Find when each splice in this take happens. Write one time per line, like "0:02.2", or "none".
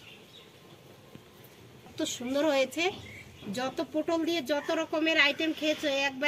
0:01.9